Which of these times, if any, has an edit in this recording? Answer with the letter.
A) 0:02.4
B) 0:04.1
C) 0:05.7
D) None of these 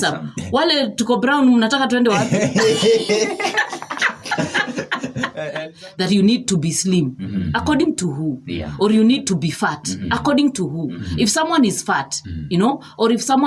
C